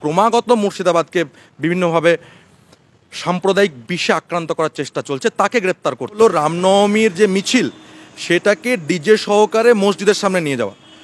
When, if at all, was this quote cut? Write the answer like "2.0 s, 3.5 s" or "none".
6.2 s